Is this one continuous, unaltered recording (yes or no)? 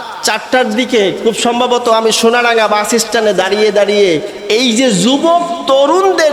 yes